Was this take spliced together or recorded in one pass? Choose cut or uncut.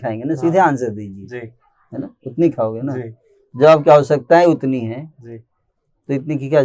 uncut